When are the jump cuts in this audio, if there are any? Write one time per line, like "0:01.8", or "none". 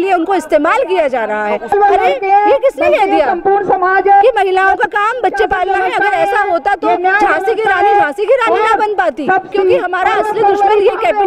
0:01.7
0:09.5